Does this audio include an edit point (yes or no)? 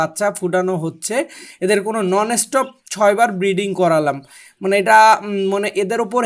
no